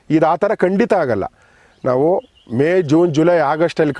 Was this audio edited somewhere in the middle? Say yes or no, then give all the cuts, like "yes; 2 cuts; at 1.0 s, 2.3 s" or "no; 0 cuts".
no; 0 cuts